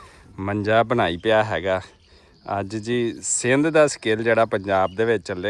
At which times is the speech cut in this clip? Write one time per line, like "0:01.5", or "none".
none